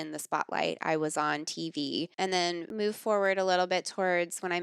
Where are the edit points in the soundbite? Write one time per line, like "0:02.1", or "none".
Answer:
0:02.4